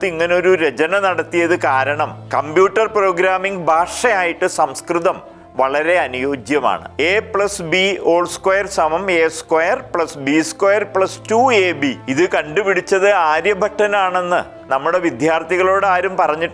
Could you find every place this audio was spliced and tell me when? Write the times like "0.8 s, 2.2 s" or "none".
2.2 s, 6.9 s, 12.0 s, 14.6 s